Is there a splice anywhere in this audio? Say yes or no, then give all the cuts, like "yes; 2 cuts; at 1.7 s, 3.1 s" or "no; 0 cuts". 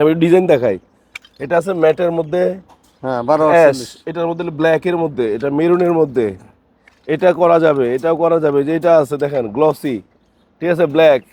no; 0 cuts